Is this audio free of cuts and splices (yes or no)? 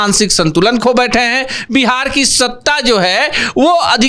yes